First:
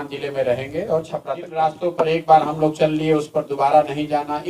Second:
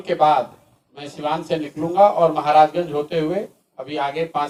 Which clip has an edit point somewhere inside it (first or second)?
first